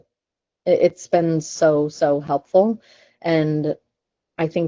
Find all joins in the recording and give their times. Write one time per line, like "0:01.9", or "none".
none

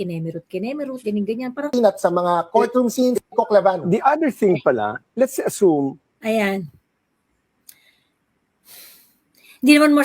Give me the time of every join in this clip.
0:01.7

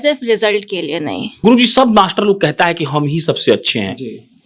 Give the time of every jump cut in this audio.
0:01.4

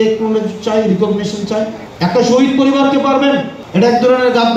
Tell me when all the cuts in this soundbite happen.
0:01.8
0:03.6

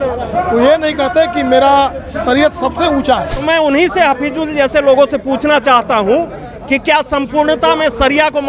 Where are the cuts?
0:03.3

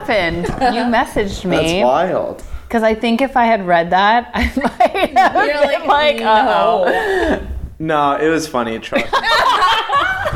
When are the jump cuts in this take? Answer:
none

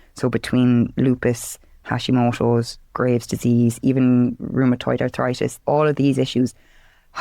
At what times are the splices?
0:05.6

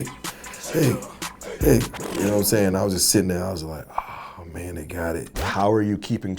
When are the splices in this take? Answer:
0:05.4

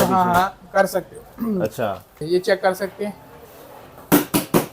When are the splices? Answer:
0:02.2

